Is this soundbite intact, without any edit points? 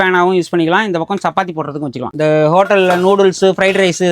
no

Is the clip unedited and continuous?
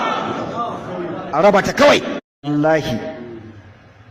no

